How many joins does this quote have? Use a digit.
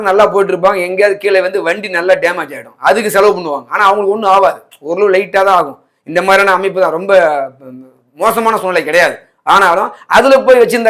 0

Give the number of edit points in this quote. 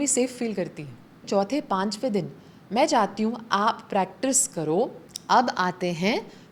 2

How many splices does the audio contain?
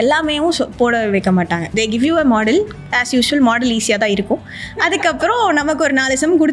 1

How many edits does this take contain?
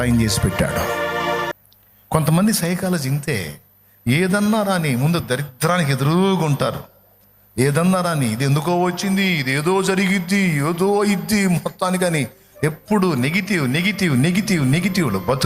1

